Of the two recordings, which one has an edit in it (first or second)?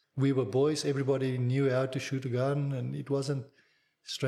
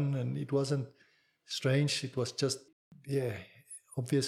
second